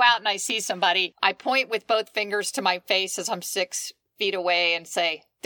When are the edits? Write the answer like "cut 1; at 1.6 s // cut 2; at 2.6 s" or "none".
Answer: cut 1; at 1.1 s